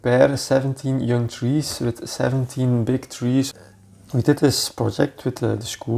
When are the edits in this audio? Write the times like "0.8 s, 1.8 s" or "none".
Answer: 3.6 s